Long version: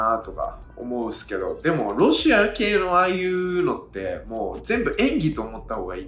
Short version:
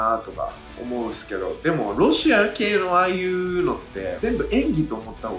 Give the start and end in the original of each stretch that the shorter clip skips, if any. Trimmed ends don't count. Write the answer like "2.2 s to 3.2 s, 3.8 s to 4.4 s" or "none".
4.1 s to 4.6 s